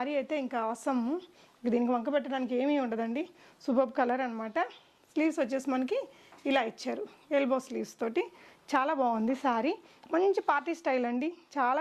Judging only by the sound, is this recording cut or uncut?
uncut